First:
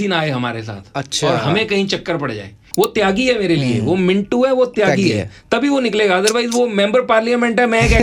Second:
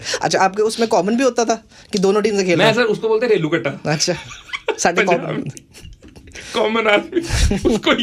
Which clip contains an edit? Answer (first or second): first